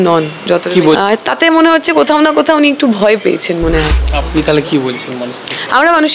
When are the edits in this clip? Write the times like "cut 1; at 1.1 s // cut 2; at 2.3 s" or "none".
cut 1; at 1.0 s // cut 2; at 3.7 s

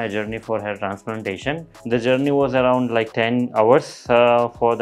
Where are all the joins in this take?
cut 1; at 1.7 s

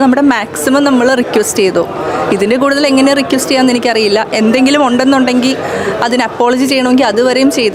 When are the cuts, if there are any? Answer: none

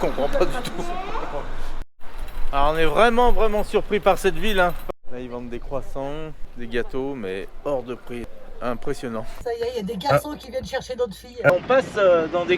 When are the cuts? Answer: cut 1; at 1.8 s // cut 2; at 4.8 s // cut 3; at 6.4 s // cut 4; at 8.3 s // cut 5; at 9.3 s // cut 6; at 11.5 s

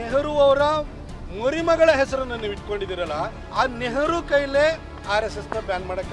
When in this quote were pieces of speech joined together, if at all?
none

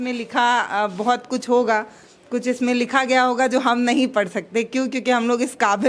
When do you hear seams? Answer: none

